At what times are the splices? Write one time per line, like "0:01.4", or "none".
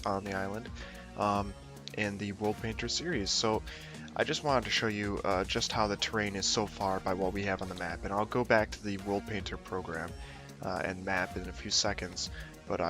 0:01.4